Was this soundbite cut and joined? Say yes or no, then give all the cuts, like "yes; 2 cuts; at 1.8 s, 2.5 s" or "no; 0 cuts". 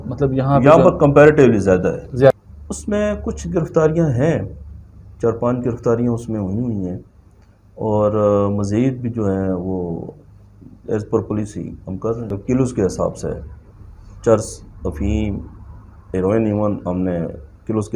yes; 2 cuts; at 2.3 s, 12.3 s